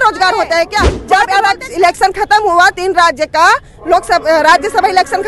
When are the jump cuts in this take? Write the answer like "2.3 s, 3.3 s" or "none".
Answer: 1.0 s